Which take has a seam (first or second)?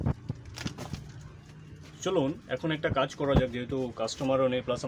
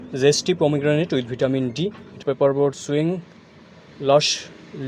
second